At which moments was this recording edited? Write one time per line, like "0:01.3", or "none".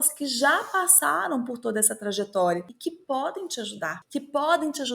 0:02.7